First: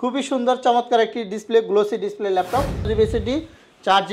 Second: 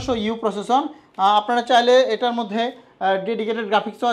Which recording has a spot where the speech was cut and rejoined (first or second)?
first